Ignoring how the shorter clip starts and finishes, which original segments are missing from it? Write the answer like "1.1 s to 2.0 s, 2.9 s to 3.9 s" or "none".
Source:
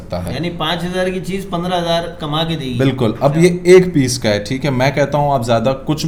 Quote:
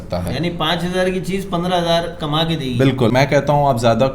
3.1 s to 4.8 s